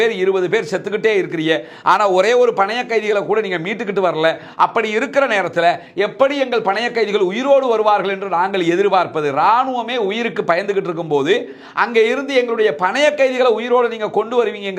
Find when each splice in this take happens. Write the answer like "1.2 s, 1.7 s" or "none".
none

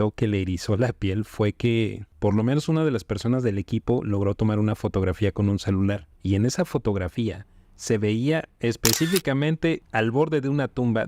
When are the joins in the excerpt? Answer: 2.0 s, 6.1 s, 9.8 s

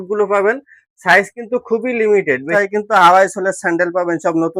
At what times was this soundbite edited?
2.5 s

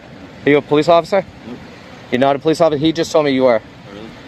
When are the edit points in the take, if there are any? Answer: none

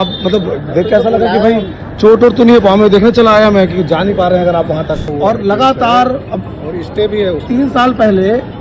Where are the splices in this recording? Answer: 5.1 s

